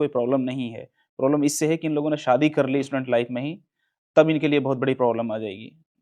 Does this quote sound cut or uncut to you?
uncut